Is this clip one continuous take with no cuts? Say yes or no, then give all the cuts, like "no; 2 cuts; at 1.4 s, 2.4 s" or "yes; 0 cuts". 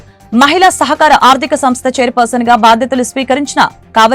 yes; 0 cuts